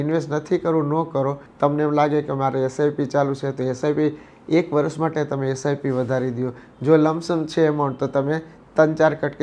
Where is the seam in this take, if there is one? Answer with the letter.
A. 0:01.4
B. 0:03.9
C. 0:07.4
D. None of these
A